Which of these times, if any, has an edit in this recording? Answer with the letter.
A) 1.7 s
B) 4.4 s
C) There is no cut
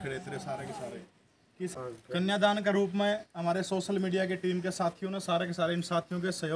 A